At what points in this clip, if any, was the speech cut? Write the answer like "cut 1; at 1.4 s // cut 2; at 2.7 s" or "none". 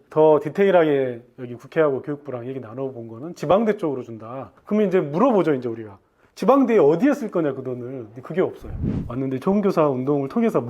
cut 1; at 8.9 s

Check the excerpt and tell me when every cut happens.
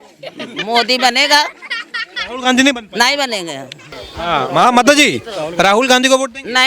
cut 1; at 3.9 s

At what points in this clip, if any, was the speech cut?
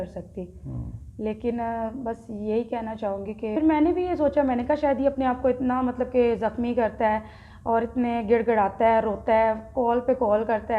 cut 1; at 3.5 s

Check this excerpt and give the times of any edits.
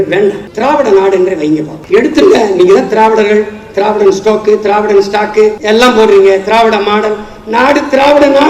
cut 1; at 5.6 s

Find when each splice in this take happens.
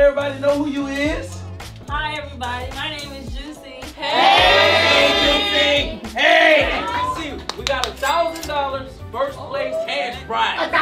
cut 1; at 6.8 s

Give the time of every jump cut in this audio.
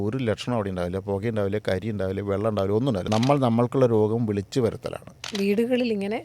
cut 1; at 3.0 s // cut 2; at 5.2 s

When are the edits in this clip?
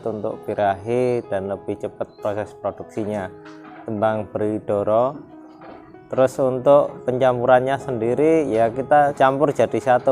cut 1; at 9.1 s

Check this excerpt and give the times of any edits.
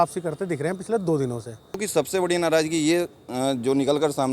cut 1; at 1.8 s

